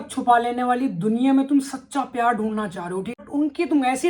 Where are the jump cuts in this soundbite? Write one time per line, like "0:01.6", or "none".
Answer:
0:03.2